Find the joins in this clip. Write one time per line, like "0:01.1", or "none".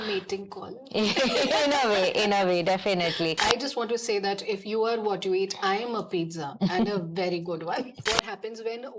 0:03.4
0:08.0